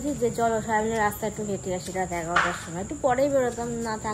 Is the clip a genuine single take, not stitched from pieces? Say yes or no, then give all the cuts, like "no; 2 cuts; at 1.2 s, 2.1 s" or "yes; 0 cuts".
yes; 0 cuts